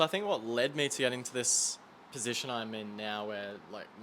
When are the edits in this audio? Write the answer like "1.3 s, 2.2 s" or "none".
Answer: none